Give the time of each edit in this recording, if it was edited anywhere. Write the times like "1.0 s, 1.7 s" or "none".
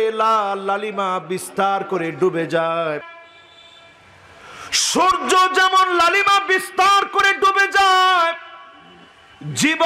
3.2 s